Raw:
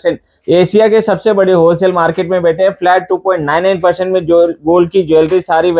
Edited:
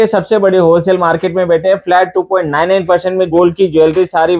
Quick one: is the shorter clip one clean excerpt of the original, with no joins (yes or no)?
no